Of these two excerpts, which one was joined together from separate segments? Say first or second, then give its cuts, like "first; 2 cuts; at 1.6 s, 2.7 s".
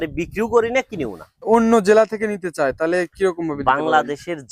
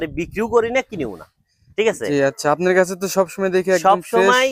first; 1 cut; at 1.5 s